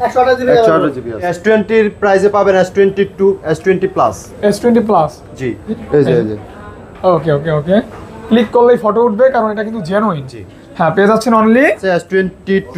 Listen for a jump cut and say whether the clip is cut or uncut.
cut